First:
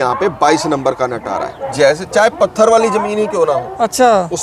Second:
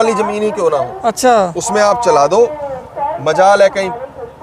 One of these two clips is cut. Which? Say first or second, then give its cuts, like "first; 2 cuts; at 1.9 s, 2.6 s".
first; 1 cut; at 1.7 s